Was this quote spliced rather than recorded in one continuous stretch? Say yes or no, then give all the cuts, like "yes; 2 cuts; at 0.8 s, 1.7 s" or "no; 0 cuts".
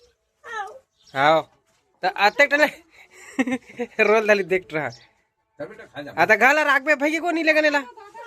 no; 0 cuts